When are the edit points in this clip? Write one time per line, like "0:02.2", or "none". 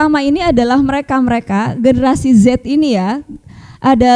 none